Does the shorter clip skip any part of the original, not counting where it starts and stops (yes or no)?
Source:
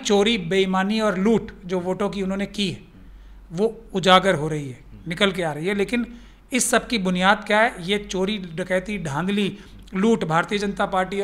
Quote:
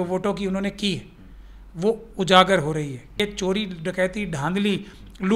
yes